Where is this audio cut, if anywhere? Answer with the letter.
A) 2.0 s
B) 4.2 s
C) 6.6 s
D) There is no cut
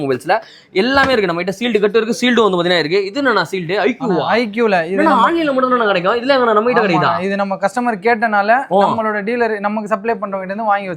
D